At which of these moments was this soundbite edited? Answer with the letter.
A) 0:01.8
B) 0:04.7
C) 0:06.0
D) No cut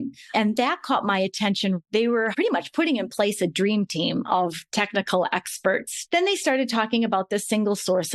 C